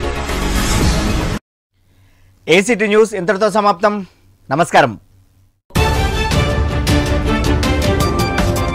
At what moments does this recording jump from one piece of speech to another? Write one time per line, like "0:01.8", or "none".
none